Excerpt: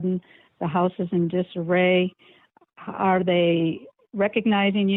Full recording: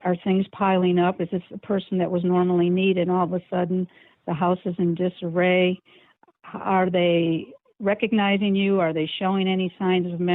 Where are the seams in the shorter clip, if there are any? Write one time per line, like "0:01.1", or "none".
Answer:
none